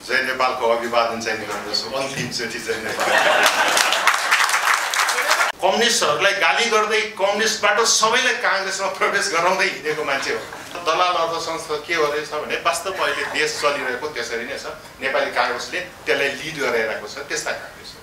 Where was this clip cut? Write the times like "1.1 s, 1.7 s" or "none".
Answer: 5.5 s, 10.8 s